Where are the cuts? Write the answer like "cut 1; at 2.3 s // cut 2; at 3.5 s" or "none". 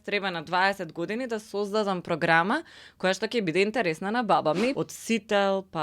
cut 1; at 4.8 s